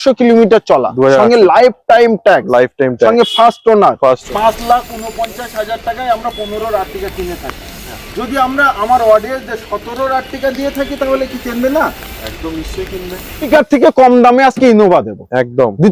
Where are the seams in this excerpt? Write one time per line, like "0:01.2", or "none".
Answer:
0:04.3
0:13.4